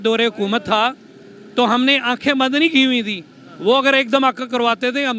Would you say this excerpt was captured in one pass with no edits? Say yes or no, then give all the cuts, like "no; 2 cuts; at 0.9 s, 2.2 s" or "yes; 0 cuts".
yes; 0 cuts